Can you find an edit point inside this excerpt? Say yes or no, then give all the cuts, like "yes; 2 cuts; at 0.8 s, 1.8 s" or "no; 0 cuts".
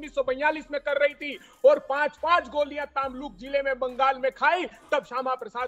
no; 0 cuts